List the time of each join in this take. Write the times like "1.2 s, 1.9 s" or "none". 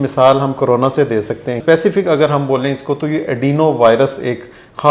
1.6 s